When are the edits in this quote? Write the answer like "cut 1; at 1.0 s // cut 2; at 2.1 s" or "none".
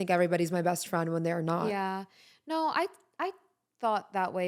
none